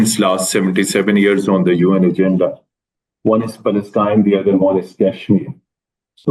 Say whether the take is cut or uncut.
uncut